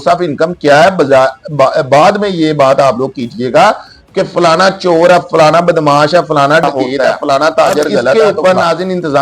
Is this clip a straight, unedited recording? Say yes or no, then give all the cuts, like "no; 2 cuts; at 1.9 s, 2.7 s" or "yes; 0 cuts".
no; 1 cut; at 8.1 s